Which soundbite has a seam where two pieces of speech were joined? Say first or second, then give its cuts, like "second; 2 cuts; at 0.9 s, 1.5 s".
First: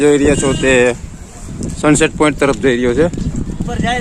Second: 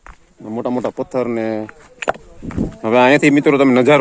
second; 1 cut; at 2.7 s